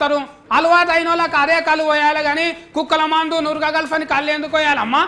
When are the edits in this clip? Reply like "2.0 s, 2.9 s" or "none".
none